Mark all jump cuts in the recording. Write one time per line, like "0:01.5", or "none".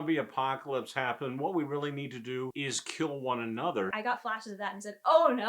0:02.5
0:03.9